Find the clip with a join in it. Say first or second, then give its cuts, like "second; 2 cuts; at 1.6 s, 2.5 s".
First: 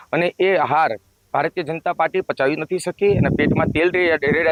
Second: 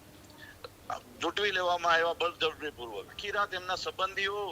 second; 1 cut; at 3.2 s